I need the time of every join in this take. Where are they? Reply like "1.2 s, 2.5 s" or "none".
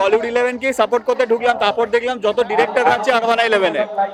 none